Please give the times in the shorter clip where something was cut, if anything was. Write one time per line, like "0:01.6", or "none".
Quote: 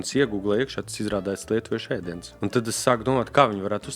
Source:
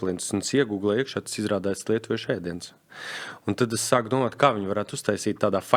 0:02.2